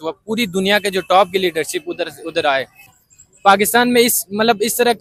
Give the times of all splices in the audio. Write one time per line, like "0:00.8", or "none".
0:02.9